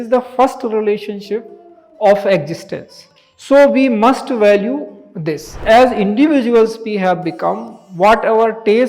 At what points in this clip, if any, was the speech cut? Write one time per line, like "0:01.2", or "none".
0:05.5